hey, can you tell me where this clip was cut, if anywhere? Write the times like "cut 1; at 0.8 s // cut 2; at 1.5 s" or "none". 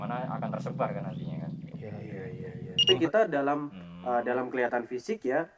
cut 1; at 2.9 s